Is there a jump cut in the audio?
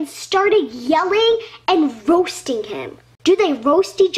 yes; 1 cut; at 3.0 s

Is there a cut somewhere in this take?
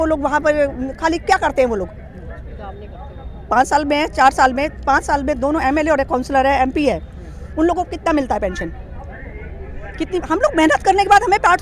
no; 0 cuts

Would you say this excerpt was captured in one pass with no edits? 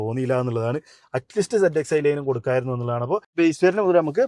no; 1 cut; at 3.3 s

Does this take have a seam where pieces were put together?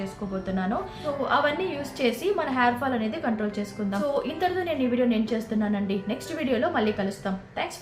no; 0 cuts

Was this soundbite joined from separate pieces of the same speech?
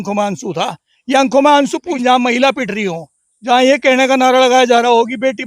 yes; 1 cut; at 1.9 s

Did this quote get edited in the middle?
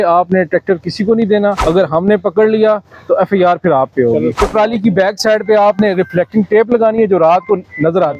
yes; 2 cuts; at 1.6 s, 4.4 s

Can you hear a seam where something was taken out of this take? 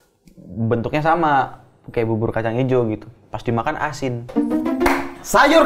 no; 0 cuts

